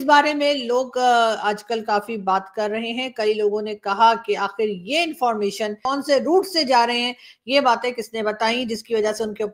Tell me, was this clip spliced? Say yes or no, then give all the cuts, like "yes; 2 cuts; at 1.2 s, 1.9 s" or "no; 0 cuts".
yes; 1 cut; at 5.8 s